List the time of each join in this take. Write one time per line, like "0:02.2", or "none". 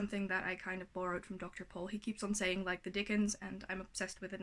none